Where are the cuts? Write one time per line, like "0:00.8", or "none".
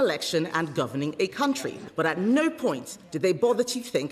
0:01.8